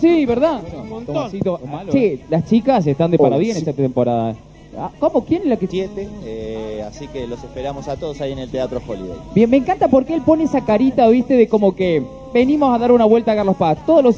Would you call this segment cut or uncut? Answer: uncut